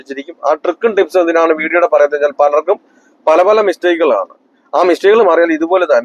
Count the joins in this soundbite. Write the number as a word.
zero